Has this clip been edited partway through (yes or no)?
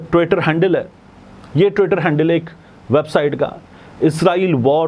no